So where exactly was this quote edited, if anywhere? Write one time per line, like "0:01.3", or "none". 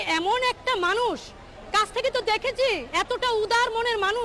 none